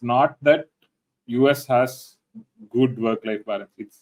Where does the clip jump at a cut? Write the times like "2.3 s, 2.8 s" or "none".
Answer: none